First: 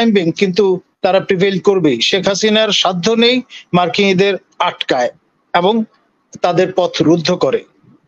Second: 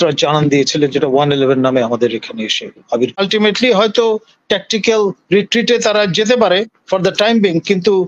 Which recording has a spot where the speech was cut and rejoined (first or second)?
second